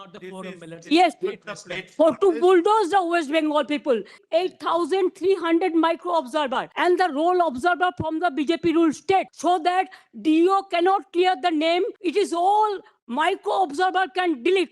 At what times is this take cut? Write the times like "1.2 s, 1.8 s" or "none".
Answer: 4.2 s, 6.7 s, 9.3 s, 12.0 s